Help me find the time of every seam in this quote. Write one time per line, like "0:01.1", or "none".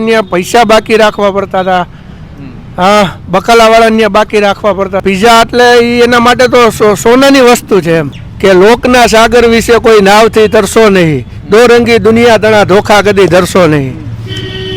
0:05.0
0:08.2

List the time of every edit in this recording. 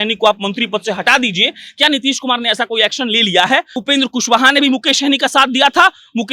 0:03.7

